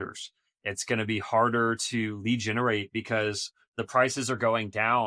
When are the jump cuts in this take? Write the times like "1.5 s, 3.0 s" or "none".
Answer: none